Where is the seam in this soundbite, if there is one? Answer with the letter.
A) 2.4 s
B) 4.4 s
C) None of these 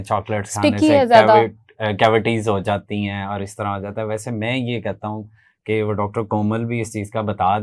C